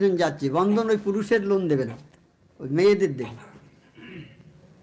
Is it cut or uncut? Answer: uncut